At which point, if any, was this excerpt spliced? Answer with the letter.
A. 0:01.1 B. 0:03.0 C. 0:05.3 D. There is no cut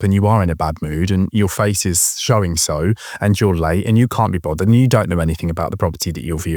D